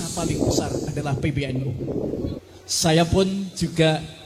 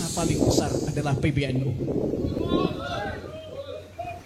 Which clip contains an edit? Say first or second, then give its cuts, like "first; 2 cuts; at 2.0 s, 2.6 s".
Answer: first; 1 cut; at 2.4 s